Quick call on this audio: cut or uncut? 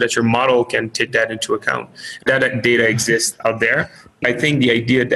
cut